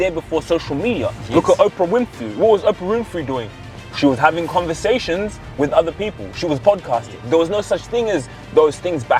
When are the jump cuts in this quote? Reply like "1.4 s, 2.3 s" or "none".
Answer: none